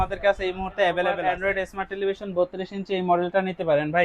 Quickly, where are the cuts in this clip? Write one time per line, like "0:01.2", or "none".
0:01.2

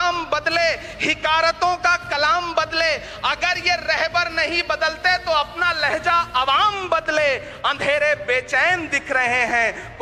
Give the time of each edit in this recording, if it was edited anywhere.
none

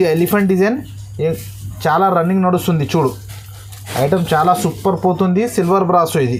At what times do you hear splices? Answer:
none

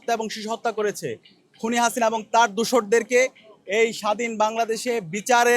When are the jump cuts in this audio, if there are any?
none

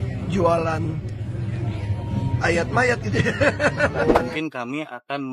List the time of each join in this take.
0:04.2

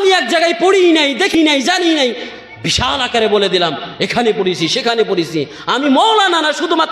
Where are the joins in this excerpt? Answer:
0:01.3

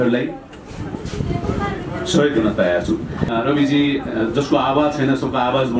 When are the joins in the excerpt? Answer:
0:03.2

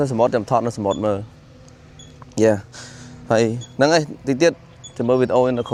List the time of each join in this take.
none

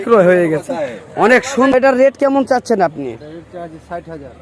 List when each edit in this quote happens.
0:01.7

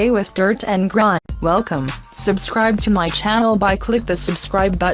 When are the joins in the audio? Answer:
none

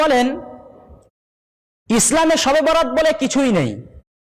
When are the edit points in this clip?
none

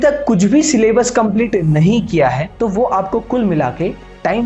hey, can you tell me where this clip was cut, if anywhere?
0:02.5

